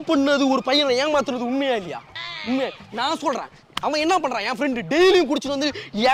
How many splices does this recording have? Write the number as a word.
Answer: zero